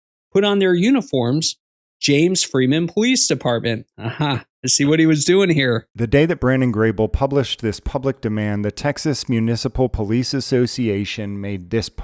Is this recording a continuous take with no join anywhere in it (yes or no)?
no